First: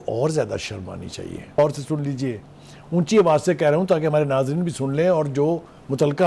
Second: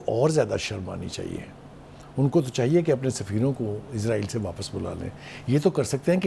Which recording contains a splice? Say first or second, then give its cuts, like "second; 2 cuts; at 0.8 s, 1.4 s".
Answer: first; 1 cut; at 1.6 s